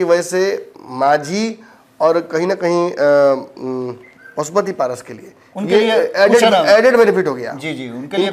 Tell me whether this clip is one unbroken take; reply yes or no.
yes